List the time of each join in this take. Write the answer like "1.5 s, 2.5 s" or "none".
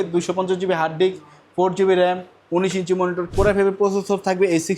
3.3 s